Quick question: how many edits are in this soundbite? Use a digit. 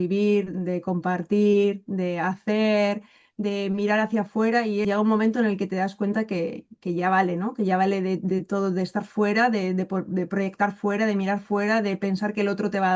1